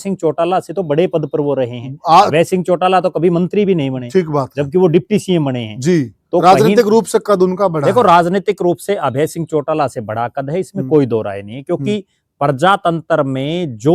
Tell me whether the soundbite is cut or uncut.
uncut